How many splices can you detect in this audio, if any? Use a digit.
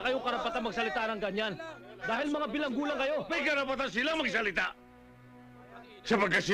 1